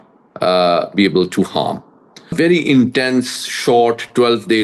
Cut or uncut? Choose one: cut